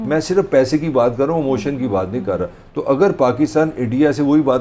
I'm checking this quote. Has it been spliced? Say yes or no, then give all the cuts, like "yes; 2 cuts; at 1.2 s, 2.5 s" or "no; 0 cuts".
no; 0 cuts